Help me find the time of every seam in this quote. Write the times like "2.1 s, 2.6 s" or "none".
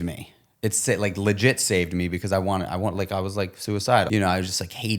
4.1 s